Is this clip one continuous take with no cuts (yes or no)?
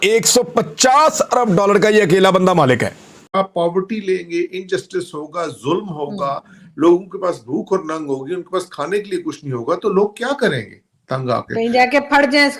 no